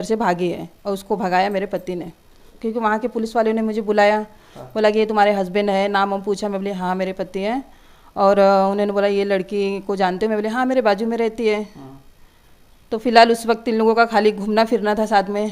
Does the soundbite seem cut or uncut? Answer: cut